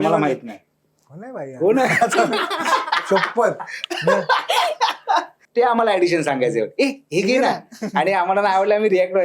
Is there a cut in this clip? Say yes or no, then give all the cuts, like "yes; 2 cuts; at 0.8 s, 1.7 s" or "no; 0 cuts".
yes; 1 cut; at 5.4 s